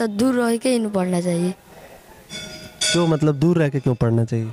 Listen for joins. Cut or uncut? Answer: uncut